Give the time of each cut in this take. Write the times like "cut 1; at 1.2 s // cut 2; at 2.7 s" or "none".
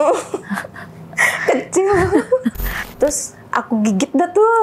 cut 1; at 2.7 s